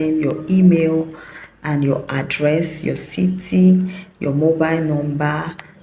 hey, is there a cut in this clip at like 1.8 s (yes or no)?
no